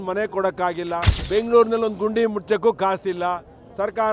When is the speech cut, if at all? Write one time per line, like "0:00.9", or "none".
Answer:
0:01.1